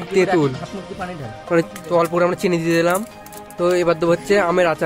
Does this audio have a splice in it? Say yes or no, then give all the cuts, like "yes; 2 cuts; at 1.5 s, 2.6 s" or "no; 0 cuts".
yes; 2 cuts; at 1.6 s, 3.5 s